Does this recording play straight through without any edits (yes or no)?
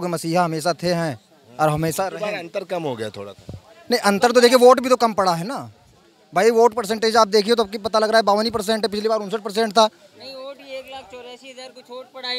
yes